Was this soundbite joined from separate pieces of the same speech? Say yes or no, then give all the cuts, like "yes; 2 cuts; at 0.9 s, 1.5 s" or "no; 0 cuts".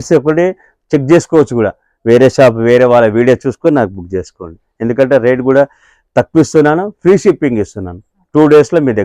no; 0 cuts